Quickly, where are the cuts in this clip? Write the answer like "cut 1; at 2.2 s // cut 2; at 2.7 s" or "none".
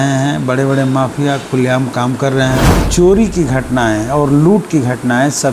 cut 1; at 2.8 s